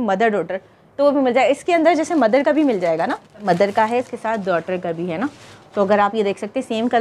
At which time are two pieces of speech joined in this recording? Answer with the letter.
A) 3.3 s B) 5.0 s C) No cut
A